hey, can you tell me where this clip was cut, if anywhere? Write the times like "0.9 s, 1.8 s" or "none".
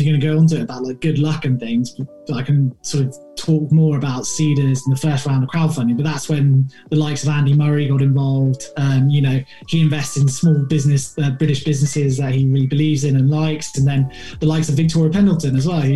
none